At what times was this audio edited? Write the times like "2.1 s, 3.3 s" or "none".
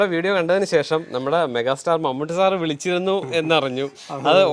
none

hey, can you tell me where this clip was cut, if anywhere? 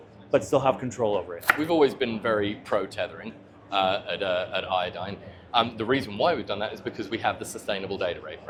none

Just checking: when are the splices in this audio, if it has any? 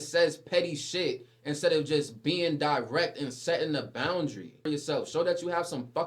4.6 s

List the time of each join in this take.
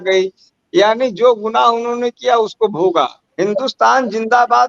3.2 s

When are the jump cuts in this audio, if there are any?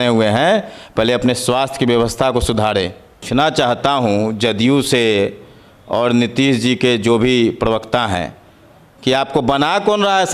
3.1 s

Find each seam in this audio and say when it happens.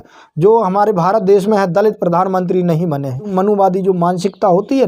3.3 s

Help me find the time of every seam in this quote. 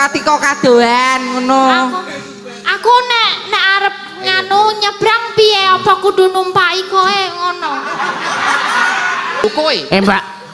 9.4 s

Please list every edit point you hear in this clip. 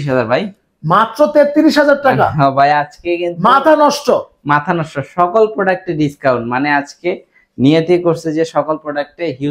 none

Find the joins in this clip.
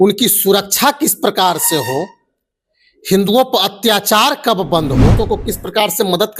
5.1 s

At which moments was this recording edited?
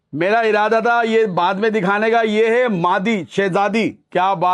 none

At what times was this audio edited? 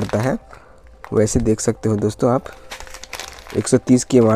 none

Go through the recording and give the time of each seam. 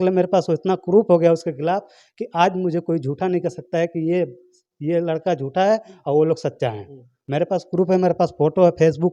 none

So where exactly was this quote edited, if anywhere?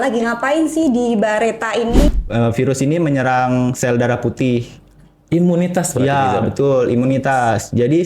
2.1 s

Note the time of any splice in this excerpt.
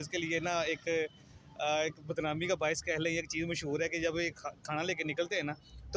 none

